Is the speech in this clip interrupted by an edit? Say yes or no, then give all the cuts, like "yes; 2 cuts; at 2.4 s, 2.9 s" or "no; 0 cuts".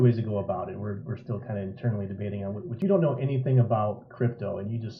yes; 1 cut; at 2.8 s